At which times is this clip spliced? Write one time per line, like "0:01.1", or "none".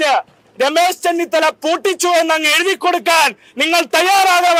none